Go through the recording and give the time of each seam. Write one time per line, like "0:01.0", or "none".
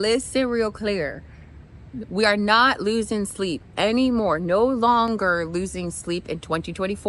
none